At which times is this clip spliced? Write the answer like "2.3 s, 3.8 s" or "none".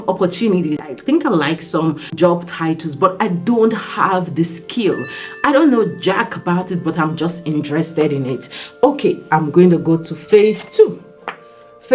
0.9 s, 2.1 s